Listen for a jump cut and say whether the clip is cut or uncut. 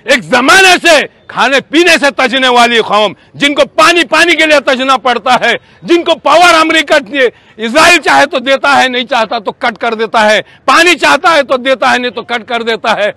uncut